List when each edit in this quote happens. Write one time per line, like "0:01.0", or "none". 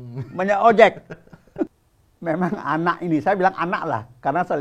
0:01.7